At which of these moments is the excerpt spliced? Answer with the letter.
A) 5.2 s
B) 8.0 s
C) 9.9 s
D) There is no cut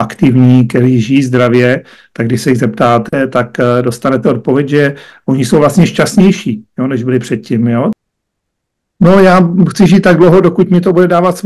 B